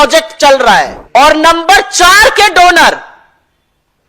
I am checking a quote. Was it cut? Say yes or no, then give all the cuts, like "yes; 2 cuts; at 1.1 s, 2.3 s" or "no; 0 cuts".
yes; 1 cut; at 1.0 s